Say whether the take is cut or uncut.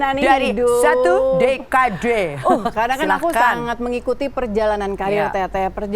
cut